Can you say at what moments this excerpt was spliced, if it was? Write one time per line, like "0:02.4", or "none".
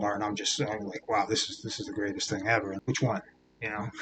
0:02.8